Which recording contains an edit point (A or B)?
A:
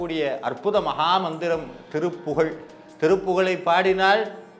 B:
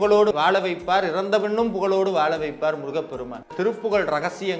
B